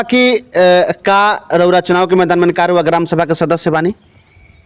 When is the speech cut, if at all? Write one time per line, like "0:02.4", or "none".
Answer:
none